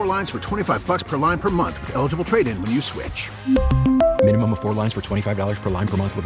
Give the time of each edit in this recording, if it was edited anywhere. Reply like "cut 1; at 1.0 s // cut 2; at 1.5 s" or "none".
none